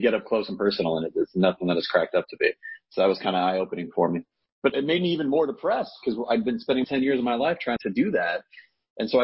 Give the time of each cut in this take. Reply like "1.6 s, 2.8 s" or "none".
4.7 s, 6.8 s, 7.8 s

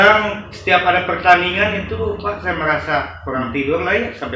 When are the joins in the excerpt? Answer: none

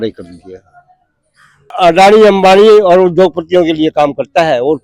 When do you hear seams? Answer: 1.7 s

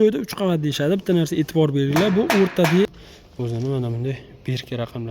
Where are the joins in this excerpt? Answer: 3.0 s

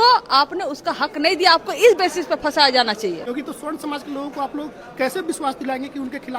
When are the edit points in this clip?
3.3 s

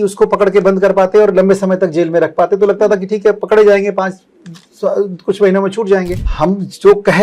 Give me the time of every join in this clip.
6.2 s

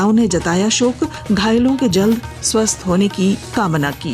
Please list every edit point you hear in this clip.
0.9 s

